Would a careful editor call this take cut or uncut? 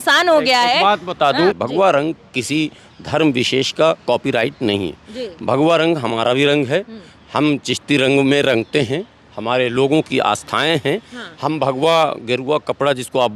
cut